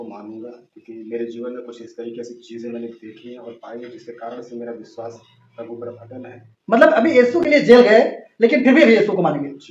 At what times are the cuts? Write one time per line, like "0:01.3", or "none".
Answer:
none